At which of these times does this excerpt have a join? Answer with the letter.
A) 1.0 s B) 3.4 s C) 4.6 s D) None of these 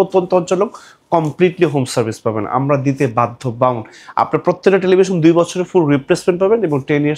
D